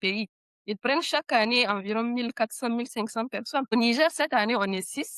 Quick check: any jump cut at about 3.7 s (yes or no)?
yes